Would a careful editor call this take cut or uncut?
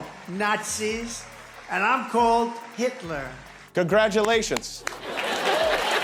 uncut